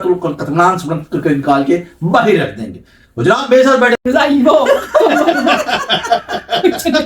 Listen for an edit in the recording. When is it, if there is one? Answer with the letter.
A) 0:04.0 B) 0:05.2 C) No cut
A